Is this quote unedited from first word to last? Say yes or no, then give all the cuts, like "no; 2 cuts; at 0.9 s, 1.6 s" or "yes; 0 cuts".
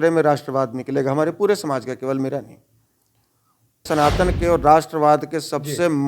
no; 1 cut; at 3.8 s